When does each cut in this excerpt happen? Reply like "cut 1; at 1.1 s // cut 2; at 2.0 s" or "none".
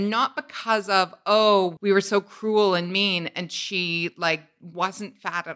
cut 1; at 1.7 s